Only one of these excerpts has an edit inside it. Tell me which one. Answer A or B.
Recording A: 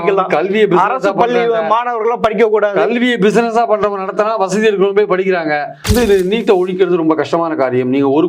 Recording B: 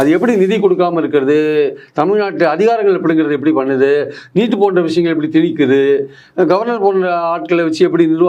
A